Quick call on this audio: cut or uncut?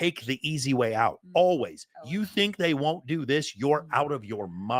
uncut